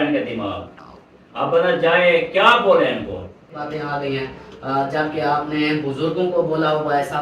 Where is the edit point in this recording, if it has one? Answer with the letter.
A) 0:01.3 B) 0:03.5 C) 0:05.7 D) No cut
B